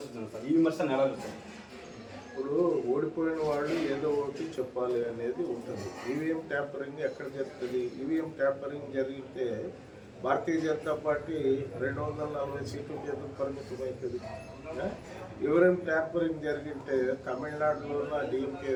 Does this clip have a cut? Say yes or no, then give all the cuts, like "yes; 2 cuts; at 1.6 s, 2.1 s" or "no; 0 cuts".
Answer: no; 0 cuts